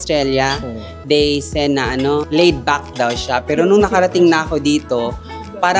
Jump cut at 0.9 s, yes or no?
no